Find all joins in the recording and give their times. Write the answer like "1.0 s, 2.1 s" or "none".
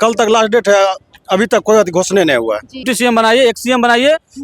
2.9 s